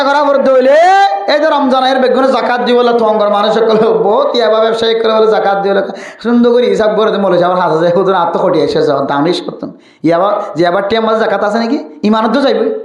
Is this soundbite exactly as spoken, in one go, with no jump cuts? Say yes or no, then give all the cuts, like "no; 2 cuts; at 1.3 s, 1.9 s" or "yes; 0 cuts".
yes; 0 cuts